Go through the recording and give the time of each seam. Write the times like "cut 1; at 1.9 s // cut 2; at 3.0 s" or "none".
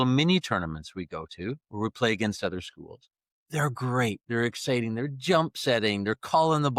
none